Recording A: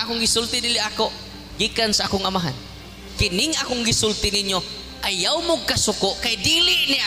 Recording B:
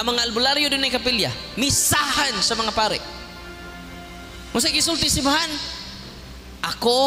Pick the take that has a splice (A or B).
A